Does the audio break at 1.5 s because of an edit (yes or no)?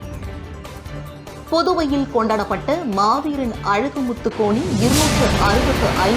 yes